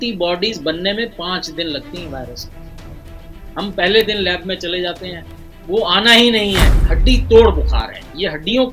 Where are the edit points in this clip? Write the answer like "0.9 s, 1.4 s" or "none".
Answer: 6.8 s